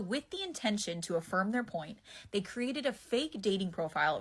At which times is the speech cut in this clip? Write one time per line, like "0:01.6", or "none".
0:01.9